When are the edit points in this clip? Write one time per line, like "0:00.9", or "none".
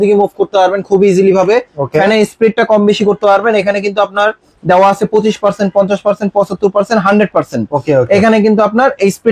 none